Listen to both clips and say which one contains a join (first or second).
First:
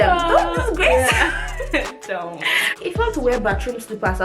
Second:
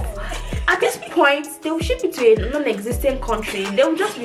first